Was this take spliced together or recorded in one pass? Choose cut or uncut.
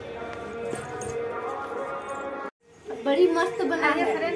cut